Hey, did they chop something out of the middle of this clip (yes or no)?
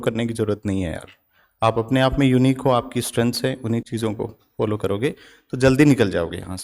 no